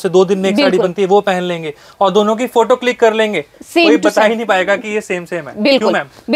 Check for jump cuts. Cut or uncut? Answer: uncut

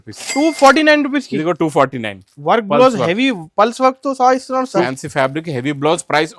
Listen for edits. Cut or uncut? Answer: cut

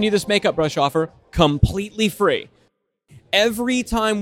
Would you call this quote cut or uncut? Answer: cut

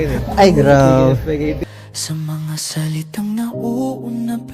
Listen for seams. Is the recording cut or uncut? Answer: cut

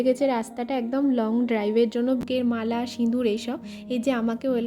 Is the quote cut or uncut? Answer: cut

